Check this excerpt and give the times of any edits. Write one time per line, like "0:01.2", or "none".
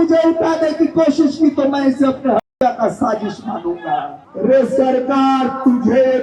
0:04.2